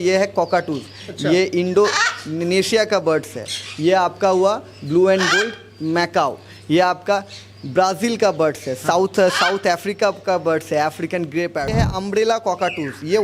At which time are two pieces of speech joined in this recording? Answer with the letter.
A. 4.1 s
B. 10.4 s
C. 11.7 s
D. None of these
C